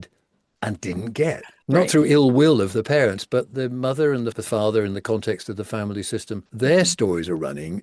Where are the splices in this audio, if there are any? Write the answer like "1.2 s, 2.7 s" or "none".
1.5 s

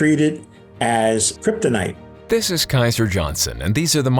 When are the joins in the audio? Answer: 1.3 s, 2.1 s

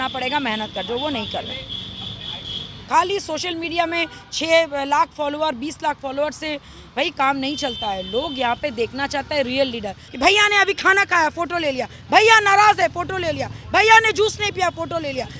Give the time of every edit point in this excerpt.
2.7 s, 10.0 s

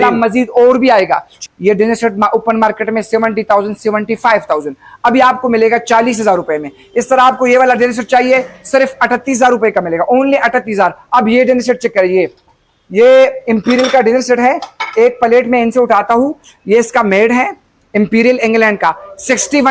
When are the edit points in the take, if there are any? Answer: 1.3 s

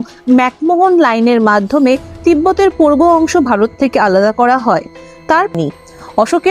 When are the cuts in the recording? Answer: 5.5 s

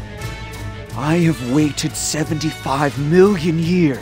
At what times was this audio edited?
0.9 s

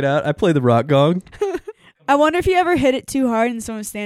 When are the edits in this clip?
1.9 s

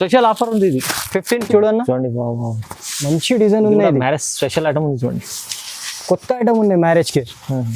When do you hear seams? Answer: 1.4 s

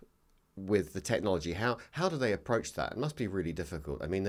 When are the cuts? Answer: none

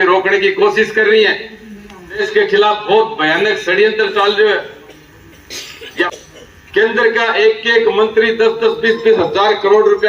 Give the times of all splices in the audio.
2.2 s, 6.1 s

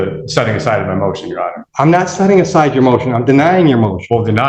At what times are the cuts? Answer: 1.6 s

